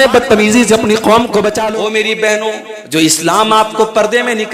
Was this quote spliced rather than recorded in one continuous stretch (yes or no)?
yes